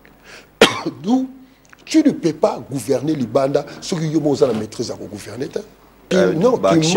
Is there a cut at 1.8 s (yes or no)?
no